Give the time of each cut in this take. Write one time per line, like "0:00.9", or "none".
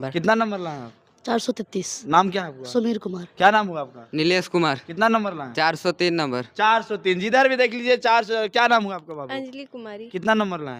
none